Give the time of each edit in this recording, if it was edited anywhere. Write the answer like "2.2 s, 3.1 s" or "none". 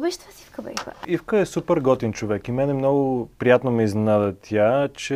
1.0 s

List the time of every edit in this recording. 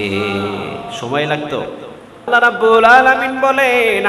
2.3 s

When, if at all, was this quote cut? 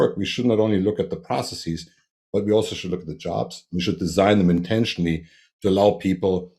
none

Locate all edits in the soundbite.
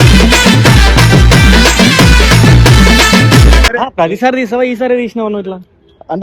3.7 s

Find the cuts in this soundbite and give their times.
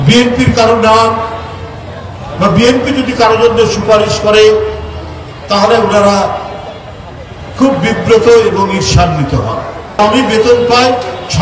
10.0 s

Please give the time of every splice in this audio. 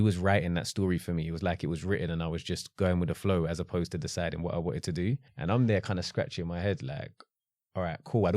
5.3 s

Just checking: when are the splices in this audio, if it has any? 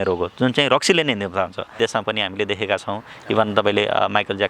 1.8 s

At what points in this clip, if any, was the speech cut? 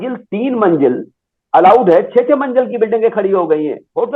none

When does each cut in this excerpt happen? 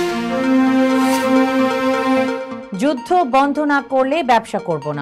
2.5 s

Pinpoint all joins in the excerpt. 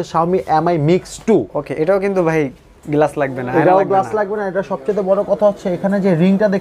none

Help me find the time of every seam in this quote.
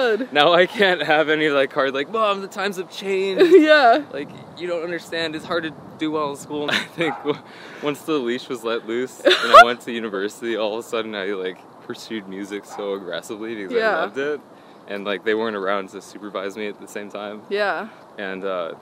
6.7 s

